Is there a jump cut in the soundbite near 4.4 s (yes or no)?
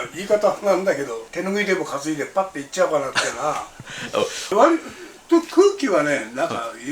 yes